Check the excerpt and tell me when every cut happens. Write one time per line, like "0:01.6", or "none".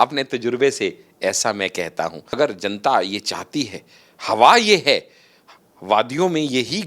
0:02.3

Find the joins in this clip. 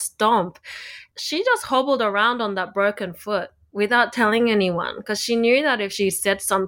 0:01.0

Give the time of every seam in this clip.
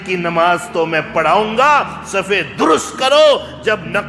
none

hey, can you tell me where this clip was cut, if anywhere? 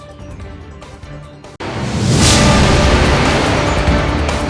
none

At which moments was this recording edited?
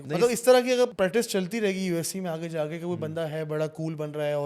0:00.9

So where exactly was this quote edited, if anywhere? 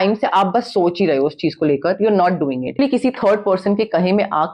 0:02.8

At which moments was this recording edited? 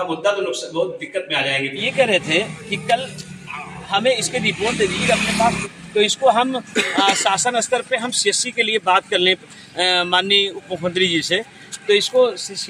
0:01.8
0:05.6

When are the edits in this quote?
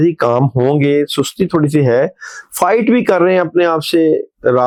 none

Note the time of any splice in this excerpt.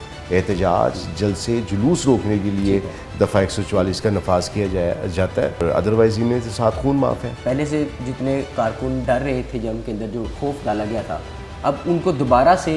0:05.6
0:07.3
0:09.0

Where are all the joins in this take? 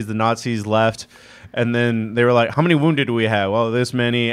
0:02.5

